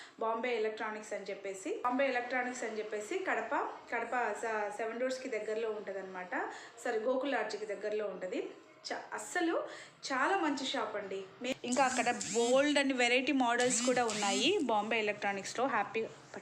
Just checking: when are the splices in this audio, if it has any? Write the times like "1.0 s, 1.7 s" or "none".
1.8 s, 11.4 s